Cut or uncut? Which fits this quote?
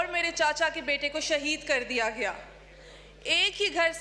uncut